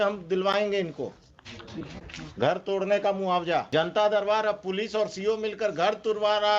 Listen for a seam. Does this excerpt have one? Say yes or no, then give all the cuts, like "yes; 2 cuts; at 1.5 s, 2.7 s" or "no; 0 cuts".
yes; 1 cut; at 3.7 s